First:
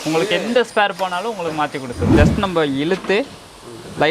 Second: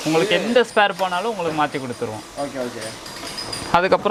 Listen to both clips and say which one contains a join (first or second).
first